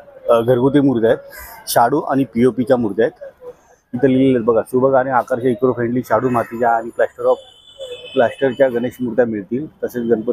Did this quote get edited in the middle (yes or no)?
no